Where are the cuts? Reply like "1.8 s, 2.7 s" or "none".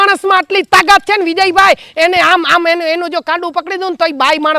none